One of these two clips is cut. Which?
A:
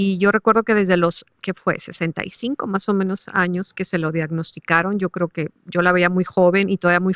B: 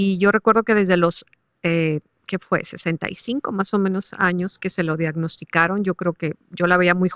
A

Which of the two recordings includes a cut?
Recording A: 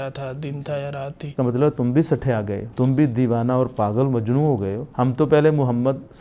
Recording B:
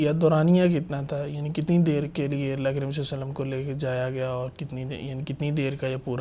A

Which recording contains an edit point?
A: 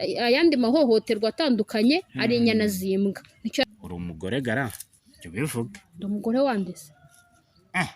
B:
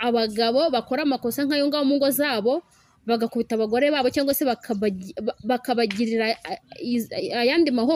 A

